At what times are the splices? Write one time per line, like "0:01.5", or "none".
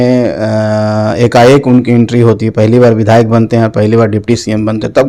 none